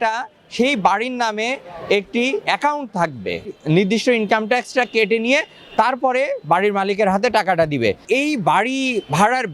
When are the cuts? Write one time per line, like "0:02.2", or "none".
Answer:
0:03.5
0:08.0